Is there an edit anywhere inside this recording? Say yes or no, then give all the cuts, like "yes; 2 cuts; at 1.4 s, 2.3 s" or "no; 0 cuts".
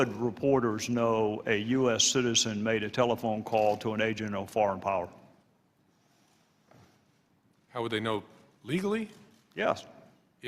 no; 0 cuts